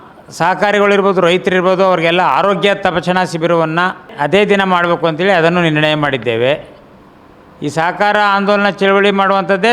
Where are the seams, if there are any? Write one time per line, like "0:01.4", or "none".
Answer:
0:04.1